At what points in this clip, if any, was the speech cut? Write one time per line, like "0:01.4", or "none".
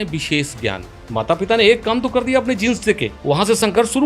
0:00.9
0:03.1

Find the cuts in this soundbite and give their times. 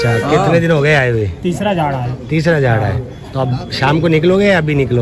none

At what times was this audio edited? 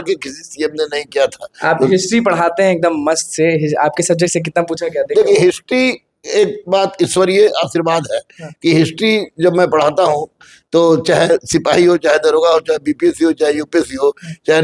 none

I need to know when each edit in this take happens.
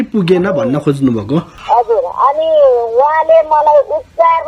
0:01.5

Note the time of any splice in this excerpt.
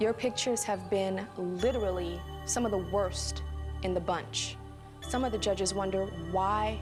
none

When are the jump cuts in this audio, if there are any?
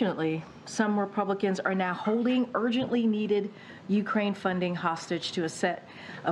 none

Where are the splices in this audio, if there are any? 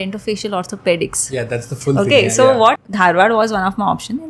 0:02.8

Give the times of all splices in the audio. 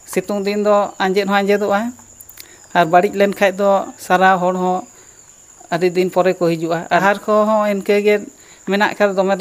0:07.0

